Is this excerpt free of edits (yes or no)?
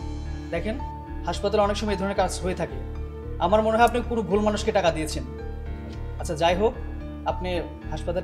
yes